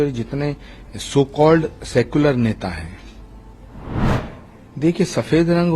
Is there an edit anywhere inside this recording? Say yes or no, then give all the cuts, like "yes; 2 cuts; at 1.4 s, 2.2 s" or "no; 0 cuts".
yes; 1 cut; at 4.1 s